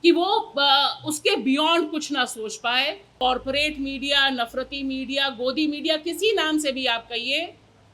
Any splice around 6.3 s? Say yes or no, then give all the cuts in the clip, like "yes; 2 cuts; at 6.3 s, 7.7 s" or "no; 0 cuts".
no; 1 cut; at 3.1 s